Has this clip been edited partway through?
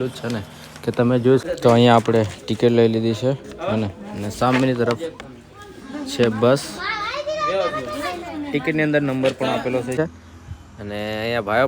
yes; 2 cuts; at 1.4 s, 10.0 s

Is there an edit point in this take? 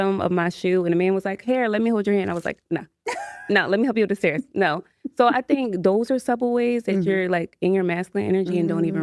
no; 0 cuts

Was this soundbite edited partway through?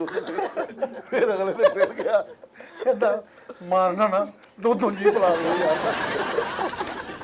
no; 0 cuts

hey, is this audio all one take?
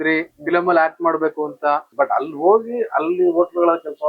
no; 1 cut; at 1.9 s

